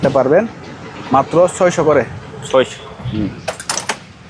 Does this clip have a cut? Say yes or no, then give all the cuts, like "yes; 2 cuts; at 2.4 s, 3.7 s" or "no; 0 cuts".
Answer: no; 0 cuts